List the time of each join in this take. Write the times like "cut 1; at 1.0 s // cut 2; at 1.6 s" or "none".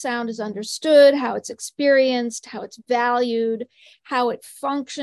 none